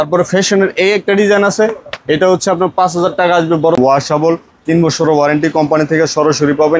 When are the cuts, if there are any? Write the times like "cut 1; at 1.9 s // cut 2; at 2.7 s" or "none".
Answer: cut 1; at 3.8 s